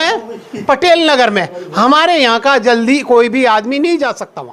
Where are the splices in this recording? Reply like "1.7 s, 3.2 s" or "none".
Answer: none